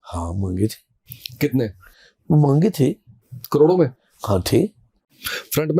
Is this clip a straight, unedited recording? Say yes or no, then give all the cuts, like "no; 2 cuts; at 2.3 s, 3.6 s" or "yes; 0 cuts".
yes; 0 cuts